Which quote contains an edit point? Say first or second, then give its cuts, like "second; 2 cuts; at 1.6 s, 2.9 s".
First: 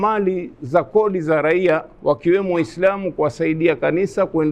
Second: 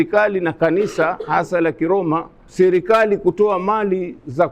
second; 1 cut; at 2.4 s